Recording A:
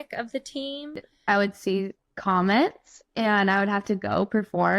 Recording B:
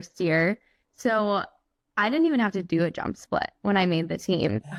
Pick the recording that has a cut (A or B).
A